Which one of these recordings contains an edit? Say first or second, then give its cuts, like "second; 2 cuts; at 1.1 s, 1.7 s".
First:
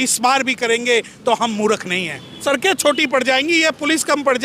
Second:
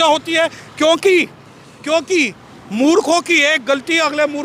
first; 1 cut; at 2.4 s